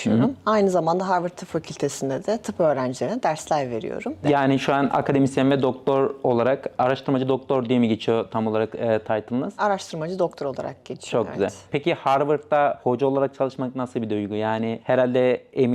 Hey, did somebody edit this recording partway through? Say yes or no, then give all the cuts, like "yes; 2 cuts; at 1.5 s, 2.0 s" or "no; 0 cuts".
no; 0 cuts